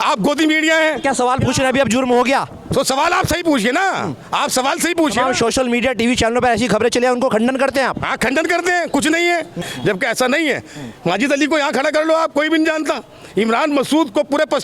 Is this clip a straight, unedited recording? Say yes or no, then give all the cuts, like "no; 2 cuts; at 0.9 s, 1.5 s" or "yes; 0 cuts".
no; 1 cut; at 9.6 s